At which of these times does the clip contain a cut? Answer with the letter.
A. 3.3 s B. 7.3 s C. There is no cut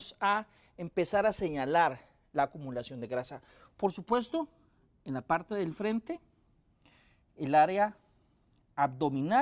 A